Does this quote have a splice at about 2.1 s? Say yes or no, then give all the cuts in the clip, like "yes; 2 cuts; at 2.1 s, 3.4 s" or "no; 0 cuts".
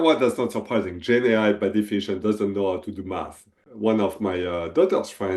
no; 1 cut; at 3.6 s